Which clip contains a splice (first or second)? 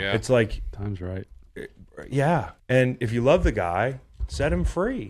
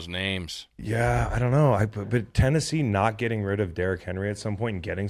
first